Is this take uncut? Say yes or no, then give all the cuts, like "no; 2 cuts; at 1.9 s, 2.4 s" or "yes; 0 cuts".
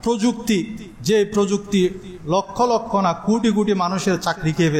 yes; 0 cuts